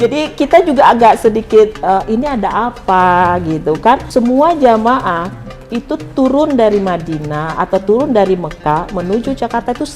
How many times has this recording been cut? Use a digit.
1